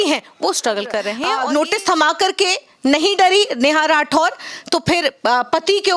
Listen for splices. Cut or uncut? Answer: cut